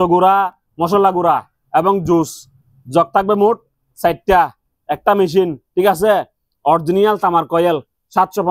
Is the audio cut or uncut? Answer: uncut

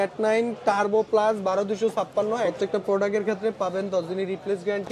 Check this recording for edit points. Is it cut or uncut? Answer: cut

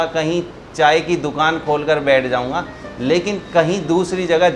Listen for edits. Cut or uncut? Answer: uncut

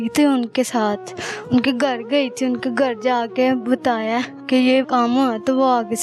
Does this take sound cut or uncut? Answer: cut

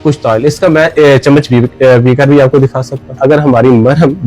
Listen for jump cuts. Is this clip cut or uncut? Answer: cut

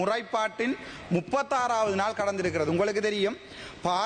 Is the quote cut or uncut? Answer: uncut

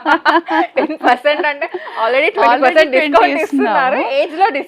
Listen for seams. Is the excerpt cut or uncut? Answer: uncut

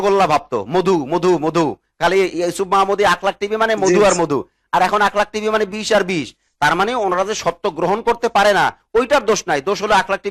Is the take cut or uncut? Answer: uncut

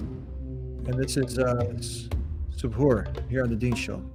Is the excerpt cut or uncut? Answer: uncut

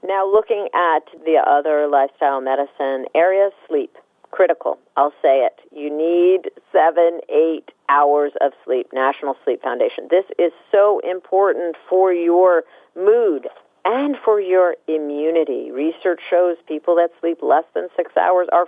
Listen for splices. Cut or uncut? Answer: cut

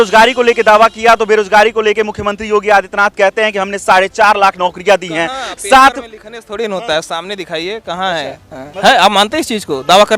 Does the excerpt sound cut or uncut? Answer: cut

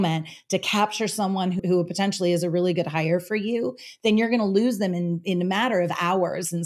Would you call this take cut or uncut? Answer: cut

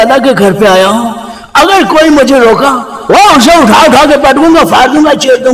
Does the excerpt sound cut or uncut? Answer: uncut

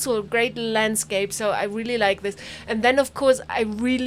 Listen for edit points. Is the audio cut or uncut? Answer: uncut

